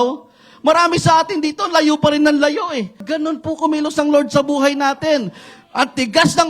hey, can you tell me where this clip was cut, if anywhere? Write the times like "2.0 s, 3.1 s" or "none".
3.1 s